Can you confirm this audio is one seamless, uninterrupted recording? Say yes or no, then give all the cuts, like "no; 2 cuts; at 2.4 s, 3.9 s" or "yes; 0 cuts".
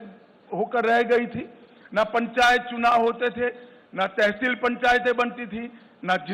yes; 0 cuts